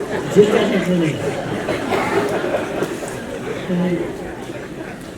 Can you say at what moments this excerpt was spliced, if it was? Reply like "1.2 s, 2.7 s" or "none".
none

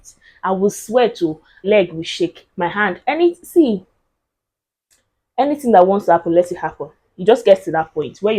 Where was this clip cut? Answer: 1.7 s

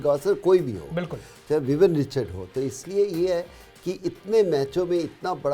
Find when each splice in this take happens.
none

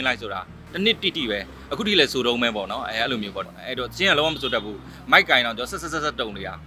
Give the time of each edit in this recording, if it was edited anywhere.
3.4 s

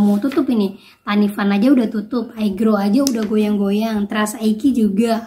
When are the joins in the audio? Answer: none

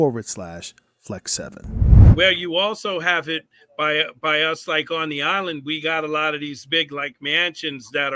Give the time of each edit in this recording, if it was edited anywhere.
1.9 s

